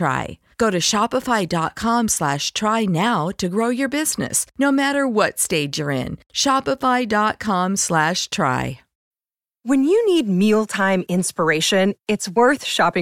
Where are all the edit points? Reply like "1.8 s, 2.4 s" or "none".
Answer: 9.1 s